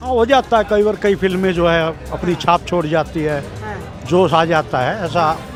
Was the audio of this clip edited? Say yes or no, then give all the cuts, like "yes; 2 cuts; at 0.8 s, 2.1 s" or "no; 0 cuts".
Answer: no; 0 cuts